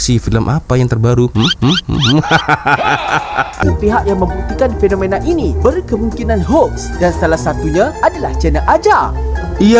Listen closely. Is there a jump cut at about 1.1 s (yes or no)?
no